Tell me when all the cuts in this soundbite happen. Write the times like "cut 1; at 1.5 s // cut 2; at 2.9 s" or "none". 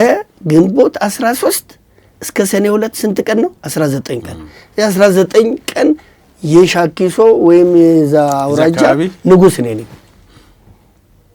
none